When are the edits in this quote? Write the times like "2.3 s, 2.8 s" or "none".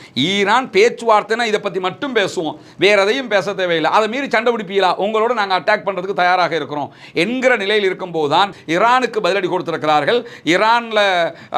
8.6 s

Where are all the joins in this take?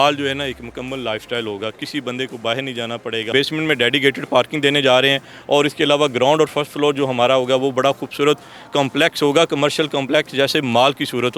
3.3 s

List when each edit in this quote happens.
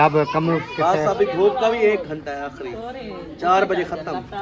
none

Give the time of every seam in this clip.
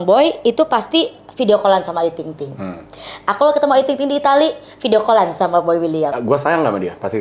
6.1 s

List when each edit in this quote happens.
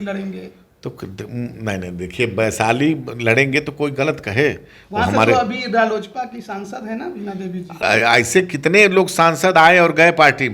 7.7 s

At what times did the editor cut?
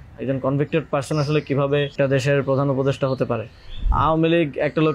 1.9 s, 3.9 s

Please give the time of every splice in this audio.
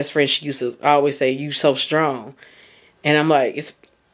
none

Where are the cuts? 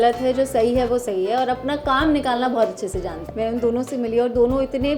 3.2 s

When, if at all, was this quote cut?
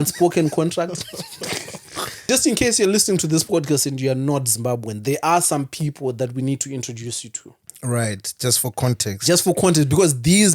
2.2 s

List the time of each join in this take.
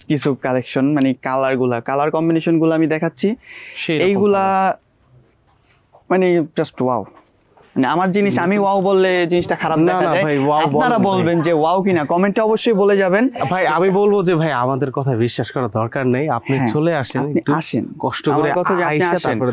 none

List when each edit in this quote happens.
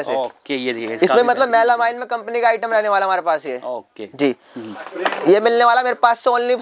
none

